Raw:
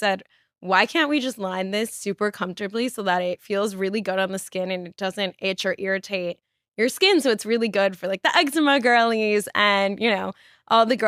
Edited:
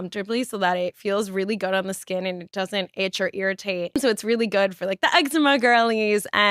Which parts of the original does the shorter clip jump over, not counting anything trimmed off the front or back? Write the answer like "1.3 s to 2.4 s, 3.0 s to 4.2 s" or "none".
6.4 s to 7.2 s